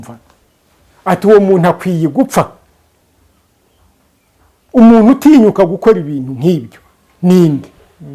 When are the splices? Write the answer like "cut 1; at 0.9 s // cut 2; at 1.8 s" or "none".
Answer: none